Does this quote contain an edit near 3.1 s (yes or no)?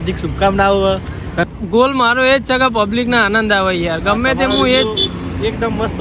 no